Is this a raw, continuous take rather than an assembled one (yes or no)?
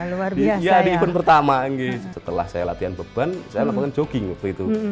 no